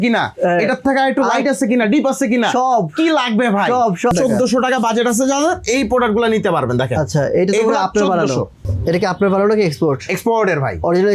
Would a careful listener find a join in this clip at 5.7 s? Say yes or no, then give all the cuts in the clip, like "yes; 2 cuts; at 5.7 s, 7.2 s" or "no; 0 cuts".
no; 2 cuts; at 4.1 s, 8.7 s